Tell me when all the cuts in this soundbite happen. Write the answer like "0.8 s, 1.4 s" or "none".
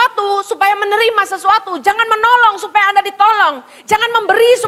none